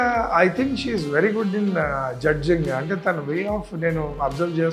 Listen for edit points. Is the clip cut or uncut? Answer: uncut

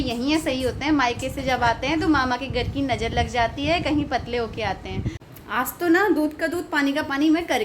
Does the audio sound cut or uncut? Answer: cut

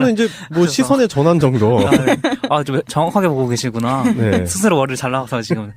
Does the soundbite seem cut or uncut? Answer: cut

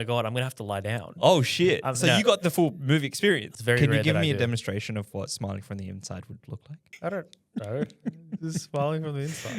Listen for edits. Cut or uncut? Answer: cut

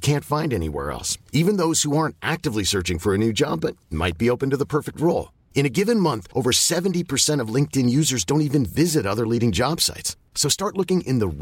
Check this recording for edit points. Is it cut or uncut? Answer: uncut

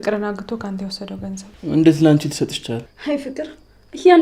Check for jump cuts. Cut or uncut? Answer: cut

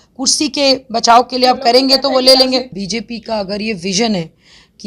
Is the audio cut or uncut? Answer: cut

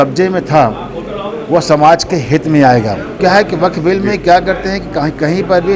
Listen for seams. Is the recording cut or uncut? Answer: cut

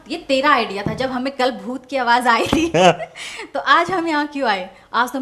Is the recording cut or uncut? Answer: uncut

